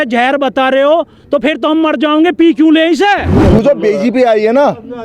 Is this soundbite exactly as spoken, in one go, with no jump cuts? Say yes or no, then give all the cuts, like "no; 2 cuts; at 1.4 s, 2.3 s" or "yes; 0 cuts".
no; 1 cut; at 3.3 s